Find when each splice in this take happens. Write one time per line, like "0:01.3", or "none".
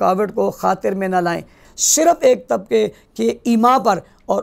0:01.7